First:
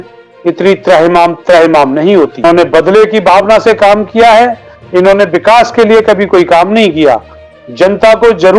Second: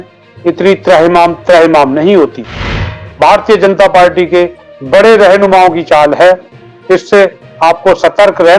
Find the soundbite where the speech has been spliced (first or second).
second